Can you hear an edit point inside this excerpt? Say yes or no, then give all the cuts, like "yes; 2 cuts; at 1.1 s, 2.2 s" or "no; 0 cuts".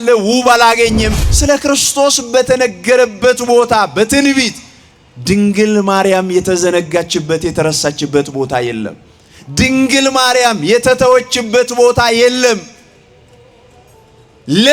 yes; 1 cut; at 1.1 s